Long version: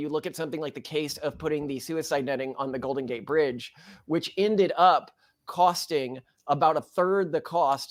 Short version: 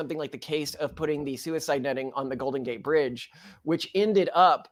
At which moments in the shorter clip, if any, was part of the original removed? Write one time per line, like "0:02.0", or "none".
none